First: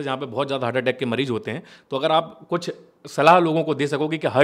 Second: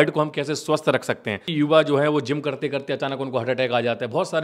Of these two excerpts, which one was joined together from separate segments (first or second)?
second